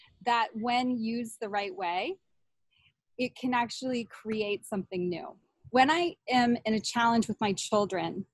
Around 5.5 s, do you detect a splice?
yes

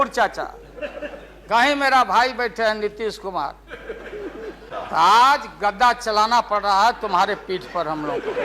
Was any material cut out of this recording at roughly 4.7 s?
yes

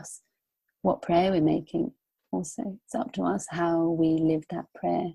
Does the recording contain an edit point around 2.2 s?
no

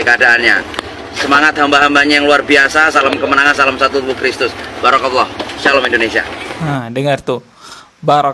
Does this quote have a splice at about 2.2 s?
no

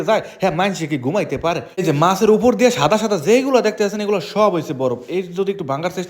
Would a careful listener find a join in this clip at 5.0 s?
no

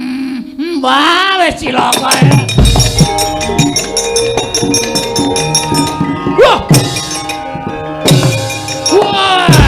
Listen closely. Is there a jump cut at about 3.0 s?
yes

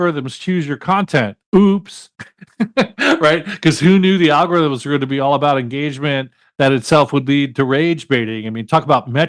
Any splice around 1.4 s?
yes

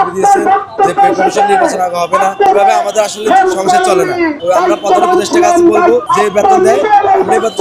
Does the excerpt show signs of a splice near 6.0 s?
yes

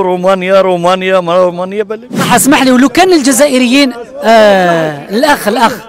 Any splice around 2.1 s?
yes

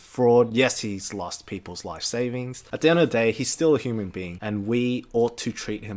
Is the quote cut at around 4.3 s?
no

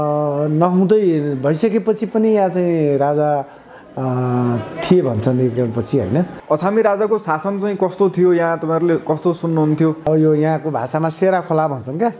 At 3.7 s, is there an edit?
no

